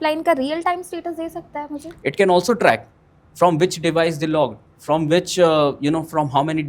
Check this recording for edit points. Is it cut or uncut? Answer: cut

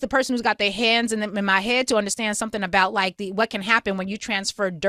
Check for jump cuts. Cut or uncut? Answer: uncut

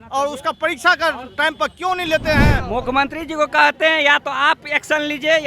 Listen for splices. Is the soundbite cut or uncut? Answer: cut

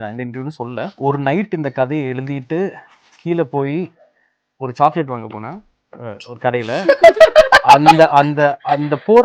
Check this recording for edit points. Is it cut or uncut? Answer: cut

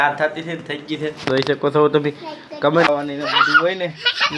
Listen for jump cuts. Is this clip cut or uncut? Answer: cut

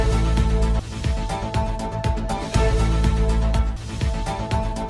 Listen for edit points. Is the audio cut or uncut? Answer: uncut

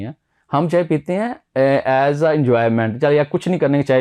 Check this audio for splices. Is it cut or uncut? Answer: uncut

